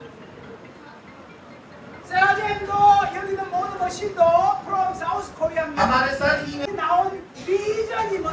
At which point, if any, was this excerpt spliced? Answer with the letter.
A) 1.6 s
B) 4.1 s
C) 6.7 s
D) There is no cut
C